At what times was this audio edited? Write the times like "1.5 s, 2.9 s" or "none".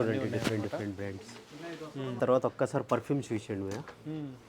2.2 s